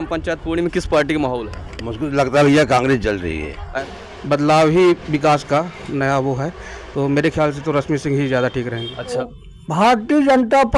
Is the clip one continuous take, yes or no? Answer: no